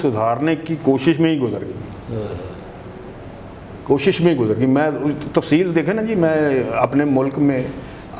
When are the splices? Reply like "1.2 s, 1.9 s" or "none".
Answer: none